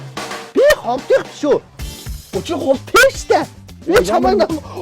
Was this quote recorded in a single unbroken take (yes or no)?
no